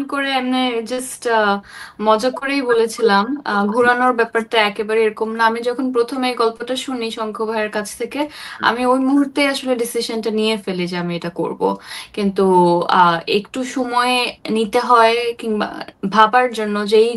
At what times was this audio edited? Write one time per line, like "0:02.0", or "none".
none